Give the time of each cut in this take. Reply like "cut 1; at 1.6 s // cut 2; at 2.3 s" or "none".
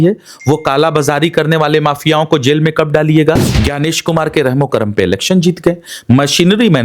cut 1; at 3.5 s